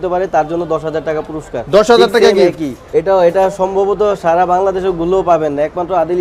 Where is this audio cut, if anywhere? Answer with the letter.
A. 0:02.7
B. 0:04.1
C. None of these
A